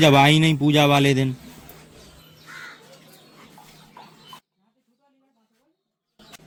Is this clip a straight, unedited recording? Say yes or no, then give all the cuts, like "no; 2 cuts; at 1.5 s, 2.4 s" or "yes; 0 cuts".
yes; 0 cuts